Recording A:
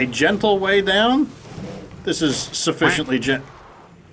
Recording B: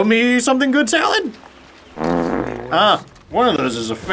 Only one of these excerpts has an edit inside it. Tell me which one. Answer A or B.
B